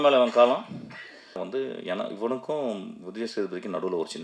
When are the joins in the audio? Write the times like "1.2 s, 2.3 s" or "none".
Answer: 1.4 s

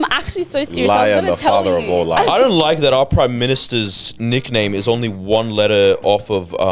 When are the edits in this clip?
2.3 s

